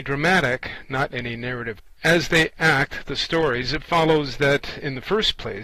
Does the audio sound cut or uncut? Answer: uncut